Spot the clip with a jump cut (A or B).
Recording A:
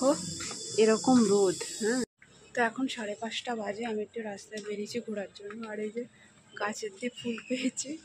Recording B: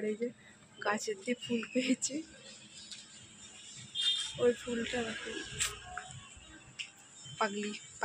A